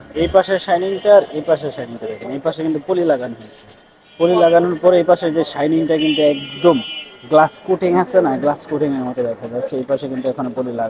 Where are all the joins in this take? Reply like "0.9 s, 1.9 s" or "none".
none